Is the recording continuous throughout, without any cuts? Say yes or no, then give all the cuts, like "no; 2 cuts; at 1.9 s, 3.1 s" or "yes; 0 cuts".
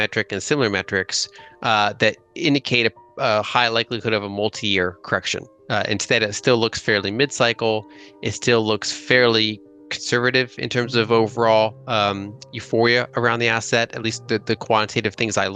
yes; 0 cuts